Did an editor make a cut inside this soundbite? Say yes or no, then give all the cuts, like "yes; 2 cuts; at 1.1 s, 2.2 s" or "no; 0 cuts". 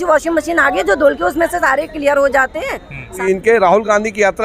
yes; 1 cut; at 3.1 s